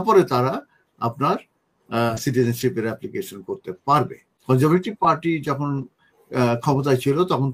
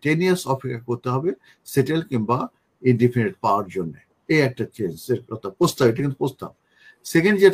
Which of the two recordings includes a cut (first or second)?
first